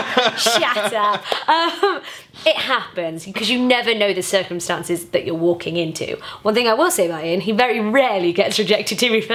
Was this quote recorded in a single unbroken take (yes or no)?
yes